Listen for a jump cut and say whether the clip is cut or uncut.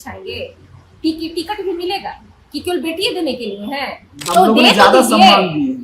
cut